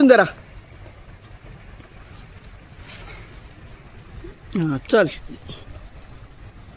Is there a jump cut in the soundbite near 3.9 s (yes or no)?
no